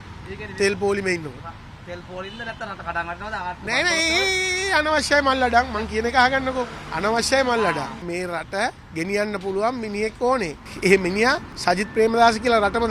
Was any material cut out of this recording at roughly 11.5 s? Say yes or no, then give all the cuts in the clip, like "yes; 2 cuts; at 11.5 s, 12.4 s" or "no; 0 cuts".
yes; 5 cuts; at 6.8 s, 8.0 s, 8.8 s, 10.6 s, 11.5 s